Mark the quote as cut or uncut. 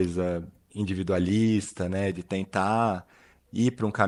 uncut